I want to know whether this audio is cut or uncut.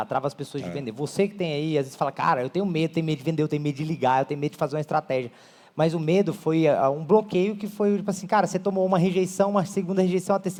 uncut